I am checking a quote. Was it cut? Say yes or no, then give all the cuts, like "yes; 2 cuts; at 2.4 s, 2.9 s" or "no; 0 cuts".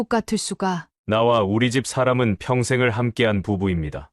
yes; 1 cut; at 0.9 s